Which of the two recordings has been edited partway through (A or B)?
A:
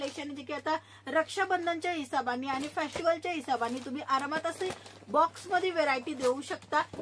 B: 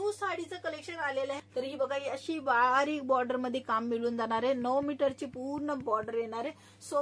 B